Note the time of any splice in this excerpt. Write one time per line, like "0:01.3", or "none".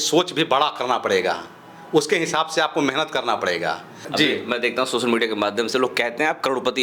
0:04.0